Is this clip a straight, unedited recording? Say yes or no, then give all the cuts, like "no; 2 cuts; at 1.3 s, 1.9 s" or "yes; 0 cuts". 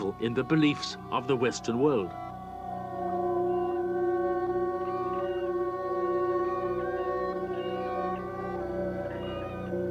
yes; 0 cuts